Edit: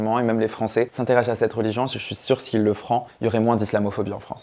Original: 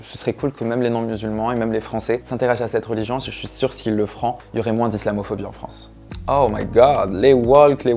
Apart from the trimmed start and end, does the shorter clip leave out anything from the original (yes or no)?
no